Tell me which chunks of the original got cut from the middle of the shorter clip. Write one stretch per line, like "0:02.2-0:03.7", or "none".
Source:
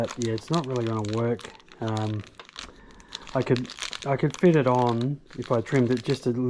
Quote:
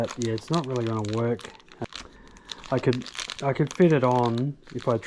0:01.7-0:02.3